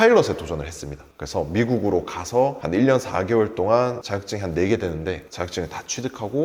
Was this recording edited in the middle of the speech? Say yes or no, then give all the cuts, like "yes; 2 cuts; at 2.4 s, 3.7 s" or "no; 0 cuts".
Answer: no; 0 cuts